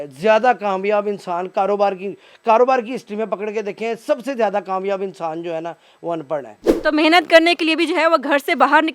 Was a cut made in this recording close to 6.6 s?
yes; 1 cut; at 6.6 s

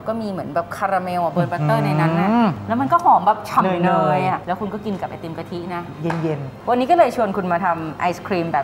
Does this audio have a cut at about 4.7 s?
no; 2 cuts; at 2.6 s, 6.6 s

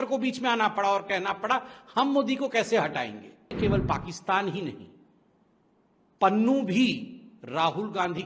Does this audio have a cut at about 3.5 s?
yes; 1 cut; at 3.5 s

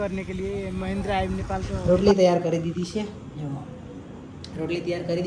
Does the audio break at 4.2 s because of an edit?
no; 1 cut; at 1.9 s

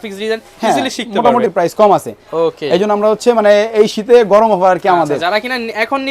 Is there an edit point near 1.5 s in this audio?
yes; 1 cut; at 1.5 s

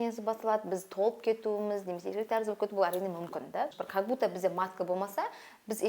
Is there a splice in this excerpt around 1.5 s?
no; 1 cut; at 3.8 s

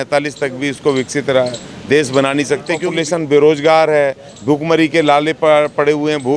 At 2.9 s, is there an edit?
yes; 1 cut; at 2.9 s

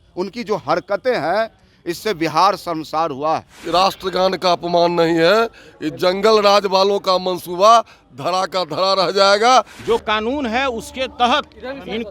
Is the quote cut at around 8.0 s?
no; 2 cuts; at 3.6 s, 9.7 s

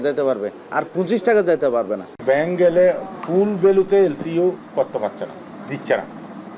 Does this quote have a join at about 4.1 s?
no; 2 cuts; at 2.1 s, 5.5 s

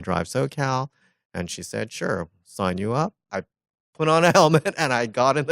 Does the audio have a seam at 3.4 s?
yes; 1 cut; at 3.4 s

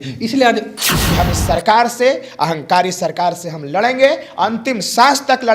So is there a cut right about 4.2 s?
no; 1 cut; at 1.0 s

